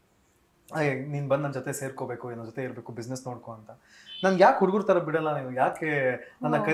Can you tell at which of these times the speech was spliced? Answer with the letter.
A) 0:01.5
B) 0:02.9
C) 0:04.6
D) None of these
D